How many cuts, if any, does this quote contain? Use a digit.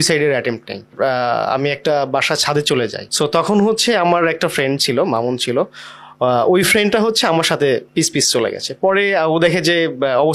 1